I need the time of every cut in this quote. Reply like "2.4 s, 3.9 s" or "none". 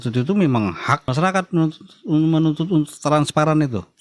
1.1 s